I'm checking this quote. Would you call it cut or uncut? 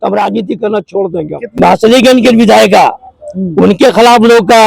cut